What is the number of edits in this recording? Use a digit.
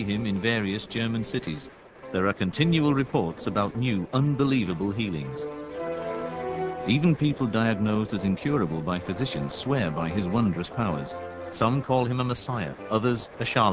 1